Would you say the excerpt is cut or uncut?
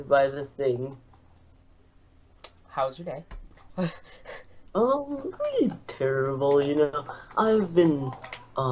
cut